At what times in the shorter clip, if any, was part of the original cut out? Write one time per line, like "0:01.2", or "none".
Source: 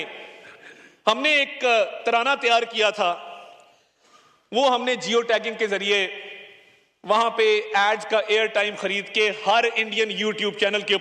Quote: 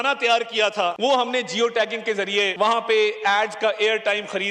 0:01.0
0:02.5